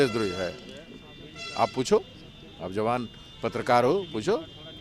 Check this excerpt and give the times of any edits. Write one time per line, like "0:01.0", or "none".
none